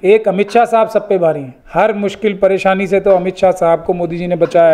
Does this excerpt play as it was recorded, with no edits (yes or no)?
no